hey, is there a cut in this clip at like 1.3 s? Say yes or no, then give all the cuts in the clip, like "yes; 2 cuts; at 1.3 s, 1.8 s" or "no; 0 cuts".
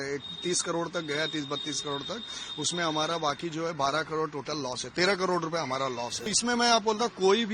no; 1 cut; at 6.3 s